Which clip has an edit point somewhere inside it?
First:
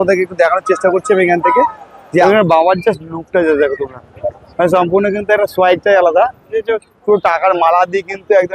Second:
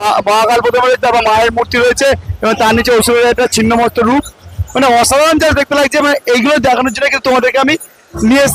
first; 2 cuts; at 2.2 s, 6.5 s

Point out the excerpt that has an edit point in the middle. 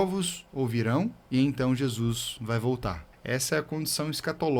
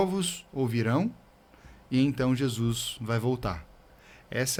first; 2 cuts; at 1.2 s, 3.1 s

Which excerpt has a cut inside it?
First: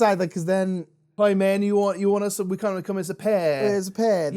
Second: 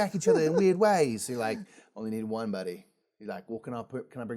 first; 1 cut; at 1.0 s

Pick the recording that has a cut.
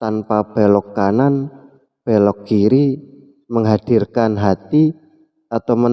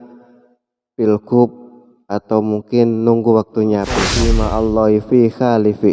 second; 1 cut; at 4.1 s

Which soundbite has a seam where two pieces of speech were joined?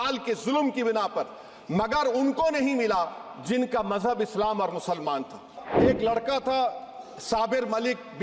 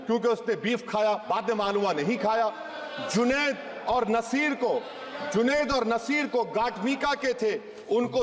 first; 1 cut; at 5.6 s

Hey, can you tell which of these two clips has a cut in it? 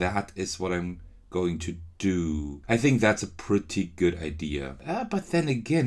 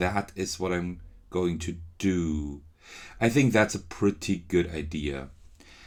first; 2 cuts; at 2.5 s, 4.7 s

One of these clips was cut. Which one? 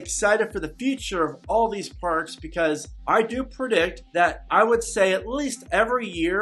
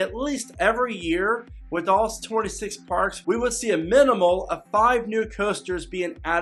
first; 2 cuts; at 2.9 s, 4.0 s

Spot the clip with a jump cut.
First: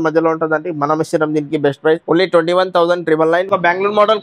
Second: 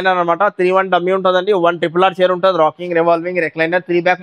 first; 2 cuts; at 2.0 s, 3.5 s

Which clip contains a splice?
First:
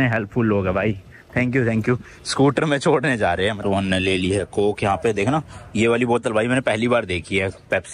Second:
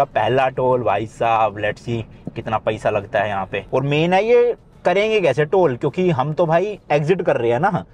first; 1 cut; at 3.6 s

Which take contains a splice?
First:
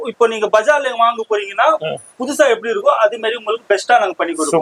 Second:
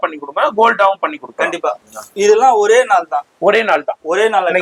second; 1 cut; at 1.9 s

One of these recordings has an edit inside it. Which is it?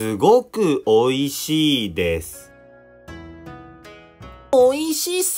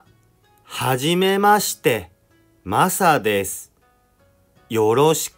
first; 2 cuts; at 2.4 s, 4.4 s

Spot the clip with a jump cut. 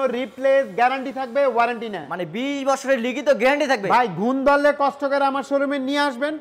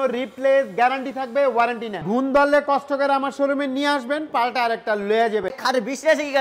second; 2 cuts; at 2.0 s, 5.6 s

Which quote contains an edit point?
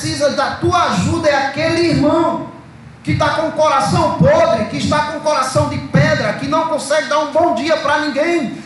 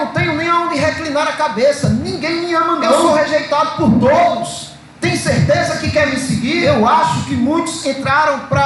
second; 2 cuts; at 3.1 s, 6.6 s

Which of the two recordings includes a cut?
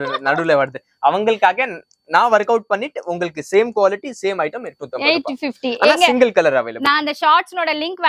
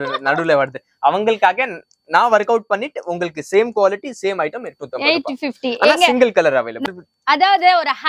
second; 1 cut; at 6.9 s

